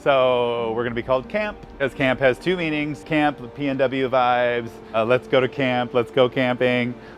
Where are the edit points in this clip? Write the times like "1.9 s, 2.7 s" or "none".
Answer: 1.8 s, 3.1 s, 5.0 s